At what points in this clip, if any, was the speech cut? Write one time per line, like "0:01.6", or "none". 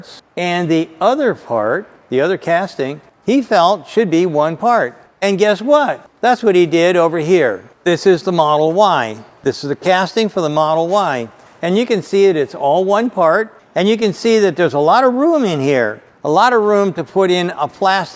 none